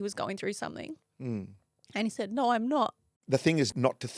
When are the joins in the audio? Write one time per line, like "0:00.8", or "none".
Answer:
0:03.1